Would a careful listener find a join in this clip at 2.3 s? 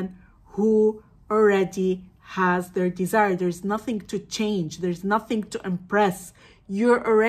no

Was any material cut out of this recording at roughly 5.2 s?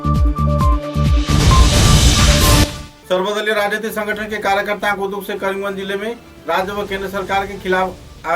no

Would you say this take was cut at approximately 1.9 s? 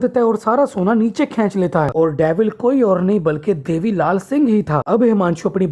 yes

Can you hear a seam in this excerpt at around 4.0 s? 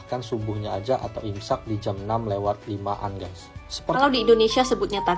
yes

